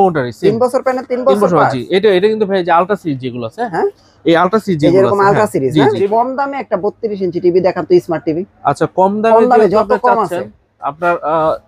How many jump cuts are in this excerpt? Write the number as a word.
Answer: one